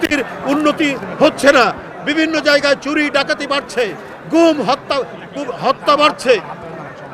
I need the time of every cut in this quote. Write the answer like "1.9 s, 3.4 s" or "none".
none